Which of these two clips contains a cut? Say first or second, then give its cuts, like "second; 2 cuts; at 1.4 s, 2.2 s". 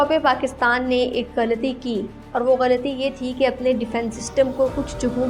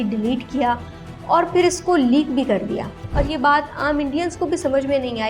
second; 1 cut; at 3.0 s